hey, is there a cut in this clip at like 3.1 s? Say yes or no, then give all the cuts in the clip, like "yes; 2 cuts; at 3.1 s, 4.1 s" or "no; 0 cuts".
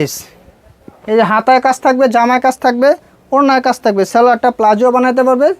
no; 0 cuts